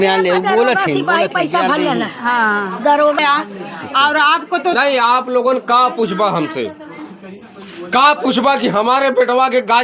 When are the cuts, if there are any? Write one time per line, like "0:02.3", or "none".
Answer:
0:03.2